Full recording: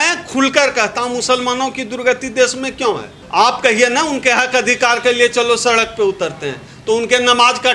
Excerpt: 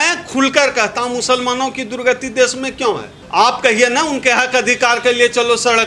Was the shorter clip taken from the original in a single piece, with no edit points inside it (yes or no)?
yes